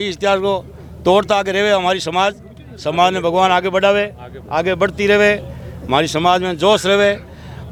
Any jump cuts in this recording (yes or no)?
no